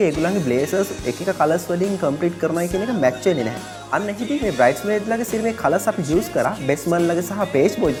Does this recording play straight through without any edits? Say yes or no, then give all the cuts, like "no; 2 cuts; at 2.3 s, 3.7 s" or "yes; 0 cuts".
yes; 0 cuts